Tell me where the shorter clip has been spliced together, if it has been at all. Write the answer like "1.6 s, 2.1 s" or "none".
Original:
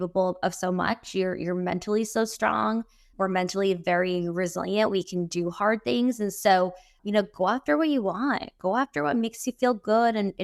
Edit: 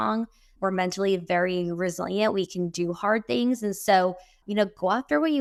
none